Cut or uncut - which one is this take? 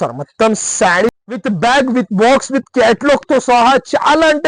cut